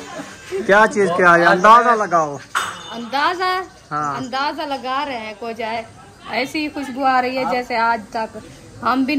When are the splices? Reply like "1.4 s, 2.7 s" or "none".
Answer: none